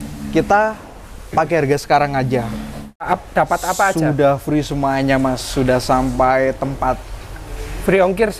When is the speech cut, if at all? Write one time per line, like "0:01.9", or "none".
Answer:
0:03.0